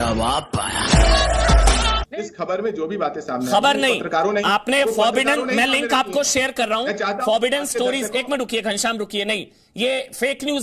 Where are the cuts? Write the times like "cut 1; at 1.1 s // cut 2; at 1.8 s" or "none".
cut 1; at 2.1 s